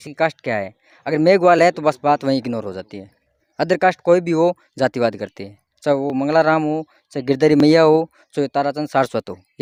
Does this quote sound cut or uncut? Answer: uncut